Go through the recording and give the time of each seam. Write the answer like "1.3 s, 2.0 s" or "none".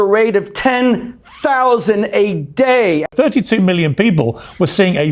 3.1 s